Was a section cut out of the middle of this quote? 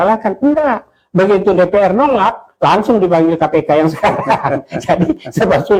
no; 0 cuts

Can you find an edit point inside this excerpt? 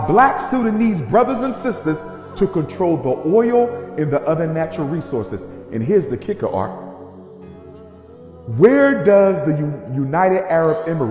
yes; 1 cut; at 5.6 s

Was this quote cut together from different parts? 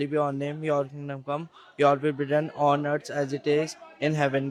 no; 0 cuts

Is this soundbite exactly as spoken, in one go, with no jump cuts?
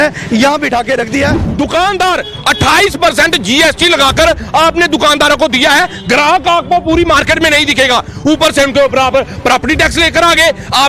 no; 1 cut; at 1.4 s

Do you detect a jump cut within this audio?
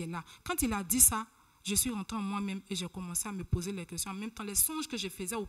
no; 0 cuts

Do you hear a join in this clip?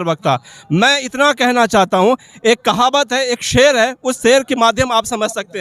no; 0 cuts

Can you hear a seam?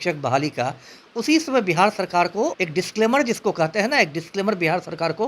yes; 1 cut; at 2.6 s

